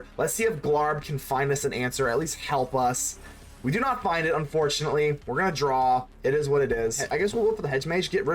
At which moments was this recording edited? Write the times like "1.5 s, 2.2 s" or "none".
7.0 s